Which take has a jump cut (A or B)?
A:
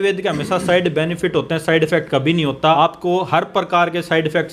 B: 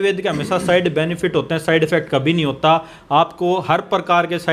A